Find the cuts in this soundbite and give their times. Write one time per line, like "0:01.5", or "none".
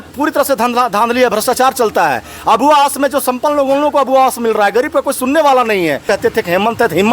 0:06.0